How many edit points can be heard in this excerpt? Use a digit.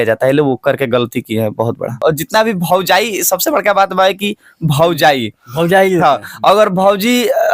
1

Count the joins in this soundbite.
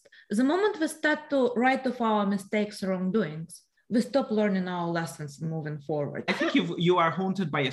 1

